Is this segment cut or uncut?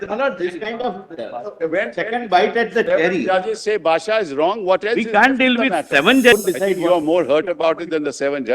cut